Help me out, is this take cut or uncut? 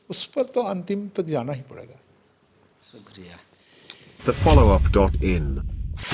uncut